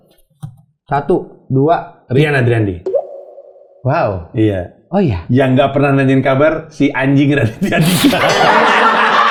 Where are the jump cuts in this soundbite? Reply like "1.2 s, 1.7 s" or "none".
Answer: none